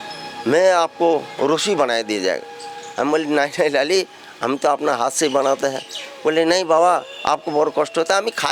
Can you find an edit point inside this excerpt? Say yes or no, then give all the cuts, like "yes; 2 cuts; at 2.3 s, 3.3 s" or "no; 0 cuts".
no; 0 cuts